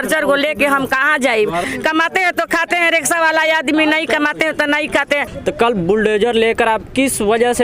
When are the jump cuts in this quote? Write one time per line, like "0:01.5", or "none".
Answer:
0:01.7
0:05.3